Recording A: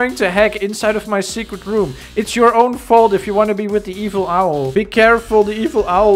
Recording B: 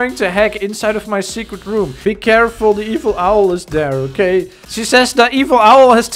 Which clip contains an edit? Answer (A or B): B